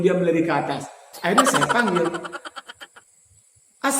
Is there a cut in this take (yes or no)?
no